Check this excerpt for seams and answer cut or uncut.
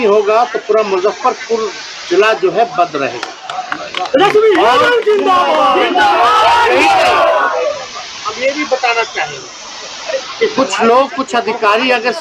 uncut